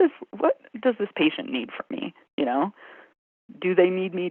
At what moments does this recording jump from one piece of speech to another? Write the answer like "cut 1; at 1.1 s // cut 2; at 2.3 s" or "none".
none

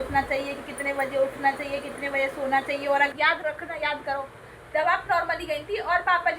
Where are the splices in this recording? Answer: cut 1; at 3.1 s

